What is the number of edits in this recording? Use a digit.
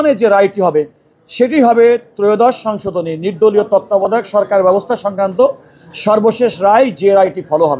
0